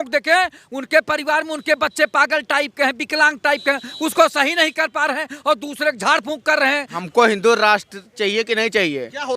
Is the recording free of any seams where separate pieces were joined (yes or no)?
no